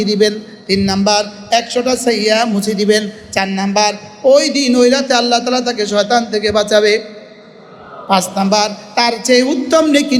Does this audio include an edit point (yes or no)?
no